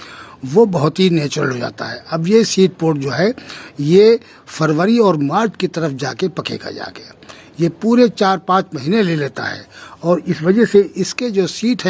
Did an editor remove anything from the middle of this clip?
no; 0 cuts

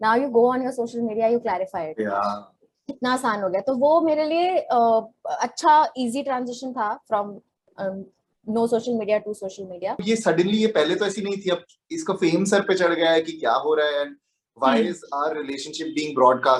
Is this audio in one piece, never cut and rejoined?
no; 1 cut; at 10.0 s

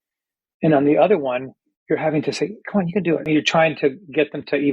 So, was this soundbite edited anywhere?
yes; 1 cut; at 3.3 s

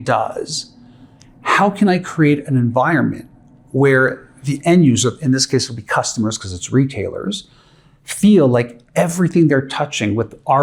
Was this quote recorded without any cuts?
yes; 0 cuts

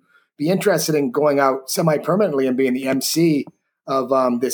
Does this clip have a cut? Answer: no; 0 cuts

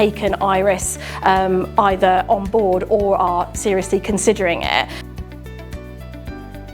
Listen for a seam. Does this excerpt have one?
yes; 1 cut; at 5.0 s

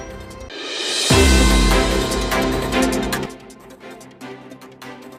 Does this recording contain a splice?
no; 0 cuts

